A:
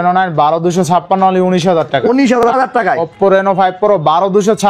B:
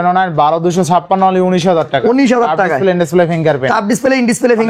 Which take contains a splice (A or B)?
A